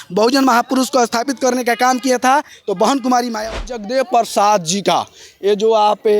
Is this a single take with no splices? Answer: no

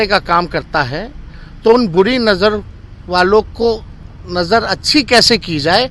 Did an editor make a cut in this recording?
no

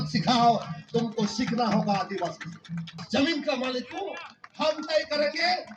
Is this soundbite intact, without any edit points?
no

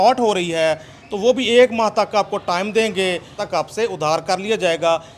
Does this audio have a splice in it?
yes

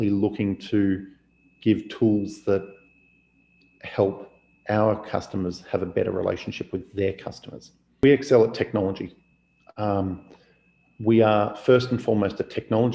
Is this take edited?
yes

